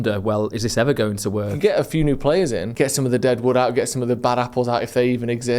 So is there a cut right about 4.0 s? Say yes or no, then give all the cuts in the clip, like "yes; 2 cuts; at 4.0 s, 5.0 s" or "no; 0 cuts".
no; 2 cuts; at 1.5 s, 2.7 s